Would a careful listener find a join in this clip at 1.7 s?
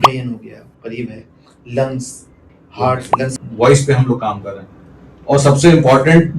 no; 1 cut; at 3.4 s

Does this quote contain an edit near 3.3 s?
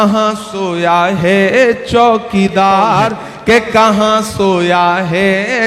yes; 1 cut; at 3.3 s

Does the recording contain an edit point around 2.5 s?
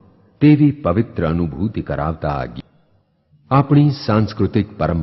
yes; 1 cut; at 2.5 s

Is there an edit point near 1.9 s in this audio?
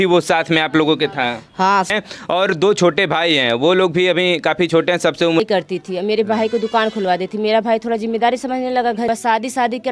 yes; 3 cuts; at 1.9 s, 5.4 s, 9.1 s

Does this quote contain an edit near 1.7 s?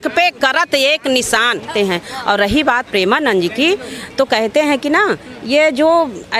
yes; 1 cut; at 1.7 s

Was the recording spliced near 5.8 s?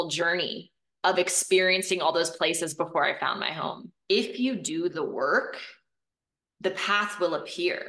no; 1 cut; at 3.9 s

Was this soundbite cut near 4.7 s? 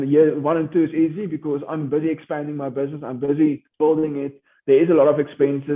no; 0 cuts

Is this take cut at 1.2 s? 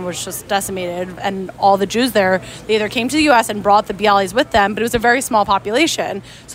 yes; 1 cut; at 1.2 s

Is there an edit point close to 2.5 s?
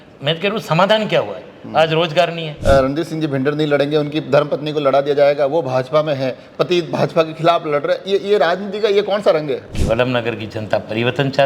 yes; 2 cuts; at 2.5 s, 9.7 s

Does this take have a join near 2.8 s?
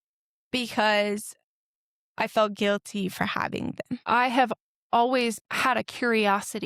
no; 2 cuts; at 4.0 s, 5.4 s

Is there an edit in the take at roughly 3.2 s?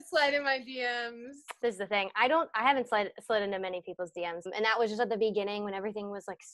no; 2 cuts; at 1.6 s, 4.5 s

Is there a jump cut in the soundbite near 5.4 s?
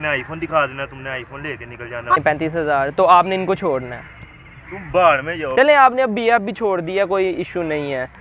yes; 2 cuts; at 2.2 s, 5.4 s

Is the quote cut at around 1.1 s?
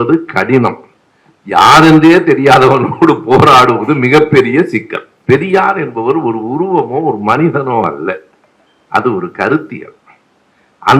no; 1 cut; at 5.1 s

